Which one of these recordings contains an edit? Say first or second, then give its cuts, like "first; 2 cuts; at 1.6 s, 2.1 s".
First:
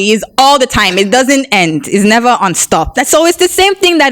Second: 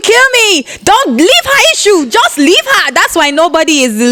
first; 1 cut; at 2.9 s